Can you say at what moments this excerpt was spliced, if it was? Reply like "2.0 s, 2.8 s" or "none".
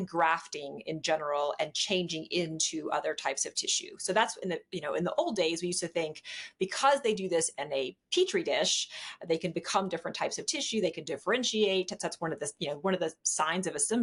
none